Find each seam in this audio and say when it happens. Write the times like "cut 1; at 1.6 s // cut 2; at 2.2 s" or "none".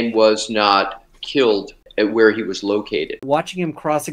cut 1; at 1.8 s // cut 2; at 3.2 s